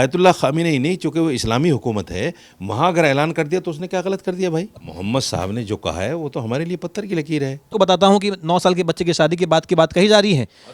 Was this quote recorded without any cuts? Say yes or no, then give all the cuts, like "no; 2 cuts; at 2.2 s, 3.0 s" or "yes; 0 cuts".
no; 2 cuts; at 4.9 s, 7.7 s